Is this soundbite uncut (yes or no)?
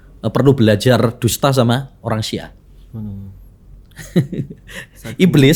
yes